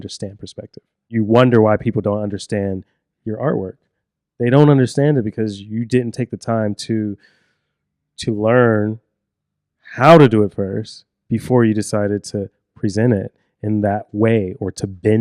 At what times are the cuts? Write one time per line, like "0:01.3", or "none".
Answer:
0:01.0

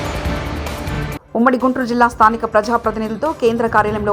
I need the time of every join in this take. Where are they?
none

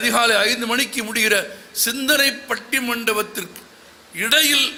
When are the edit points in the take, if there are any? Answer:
none

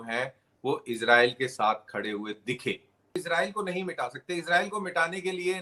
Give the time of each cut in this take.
0:03.2

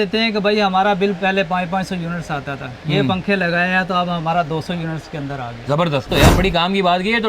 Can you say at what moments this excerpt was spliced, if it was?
0:06.1

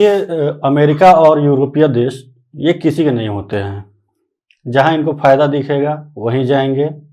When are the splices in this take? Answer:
none

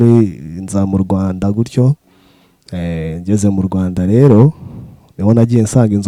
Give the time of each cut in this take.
none

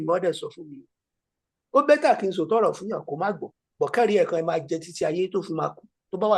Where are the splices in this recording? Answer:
none

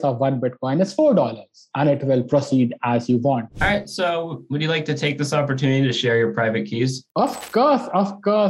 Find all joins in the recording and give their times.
0:03.5

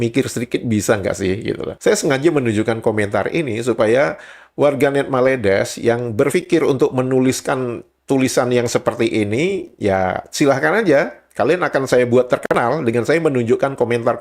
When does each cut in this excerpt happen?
0:01.7

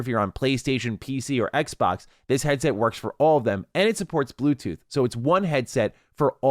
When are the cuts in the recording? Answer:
none

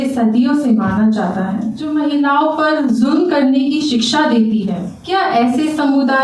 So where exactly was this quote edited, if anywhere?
0:01.8
0:04.9

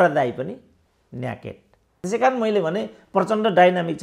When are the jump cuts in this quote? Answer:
0:01.9

